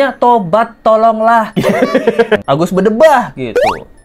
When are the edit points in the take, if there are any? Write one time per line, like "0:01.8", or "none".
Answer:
0:02.4